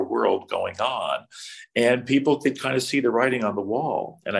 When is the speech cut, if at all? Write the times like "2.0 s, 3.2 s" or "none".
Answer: none